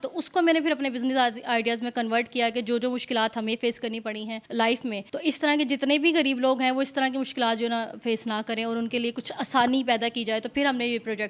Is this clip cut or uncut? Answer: cut